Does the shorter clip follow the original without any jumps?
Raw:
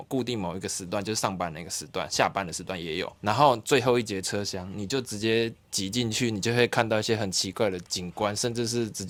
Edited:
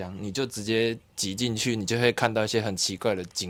yes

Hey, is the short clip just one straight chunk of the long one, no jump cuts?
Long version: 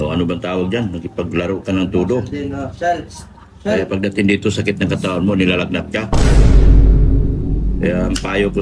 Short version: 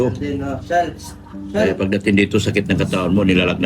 yes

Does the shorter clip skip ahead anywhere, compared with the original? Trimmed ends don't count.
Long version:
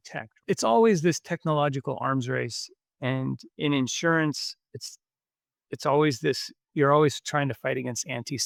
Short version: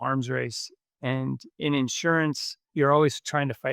yes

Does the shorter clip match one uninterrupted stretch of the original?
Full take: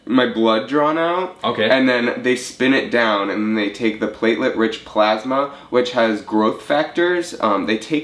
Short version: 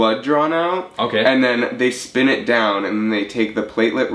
yes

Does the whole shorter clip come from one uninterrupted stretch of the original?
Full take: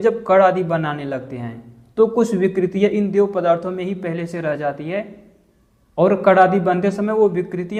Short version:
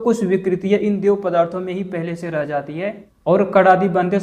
no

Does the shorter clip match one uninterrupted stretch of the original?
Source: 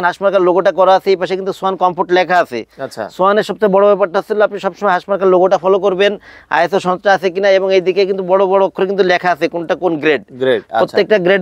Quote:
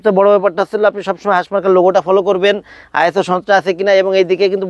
yes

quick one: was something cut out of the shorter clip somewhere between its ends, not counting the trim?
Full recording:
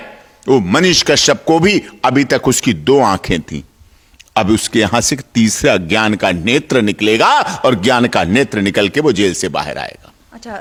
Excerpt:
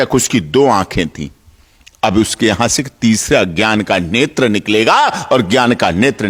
no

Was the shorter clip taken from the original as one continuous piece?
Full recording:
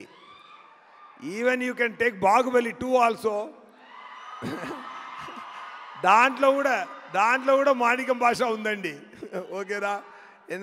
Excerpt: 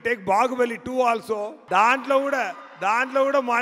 no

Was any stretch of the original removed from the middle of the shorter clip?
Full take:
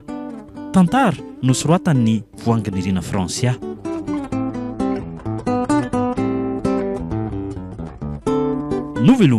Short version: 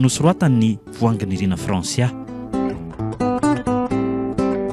yes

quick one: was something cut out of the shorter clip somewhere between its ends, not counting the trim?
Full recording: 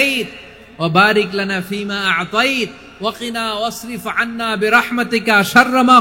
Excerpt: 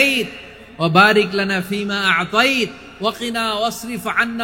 no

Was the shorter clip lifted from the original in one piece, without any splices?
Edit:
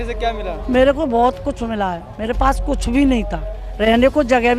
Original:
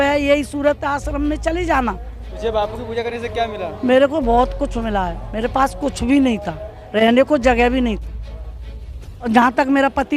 yes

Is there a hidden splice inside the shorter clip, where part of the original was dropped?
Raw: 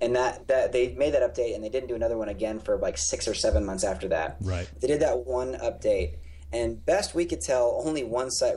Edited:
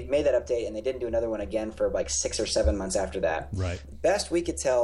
yes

